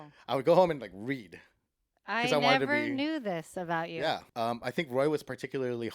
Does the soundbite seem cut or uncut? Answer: cut